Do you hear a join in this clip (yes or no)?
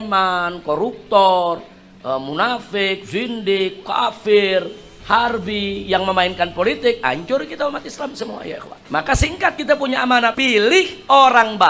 yes